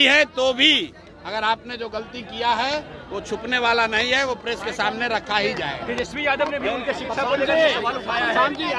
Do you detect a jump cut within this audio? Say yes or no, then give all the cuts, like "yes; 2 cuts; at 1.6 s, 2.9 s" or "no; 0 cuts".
no; 0 cuts